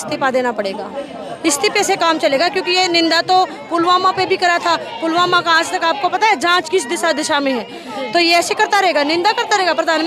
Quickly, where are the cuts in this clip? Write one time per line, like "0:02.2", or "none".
none